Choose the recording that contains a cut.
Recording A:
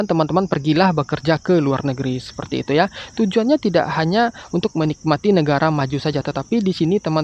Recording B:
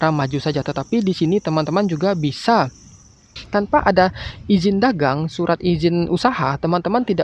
B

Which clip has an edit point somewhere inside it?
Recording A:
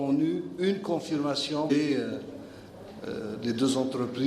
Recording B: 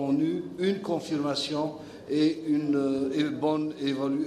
B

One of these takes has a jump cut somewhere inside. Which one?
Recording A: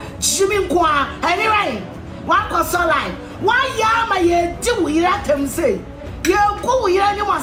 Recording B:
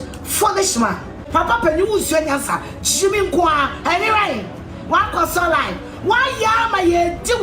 B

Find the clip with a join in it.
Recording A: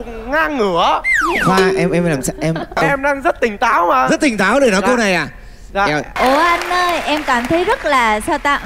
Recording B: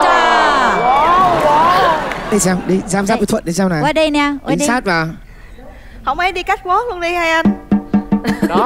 A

